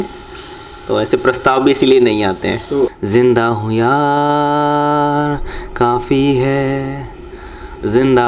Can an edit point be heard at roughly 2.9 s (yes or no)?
yes